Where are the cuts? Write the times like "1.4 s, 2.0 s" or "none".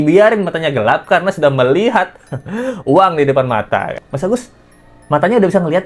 4.0 s